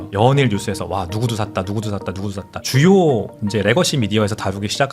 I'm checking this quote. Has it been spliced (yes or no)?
yes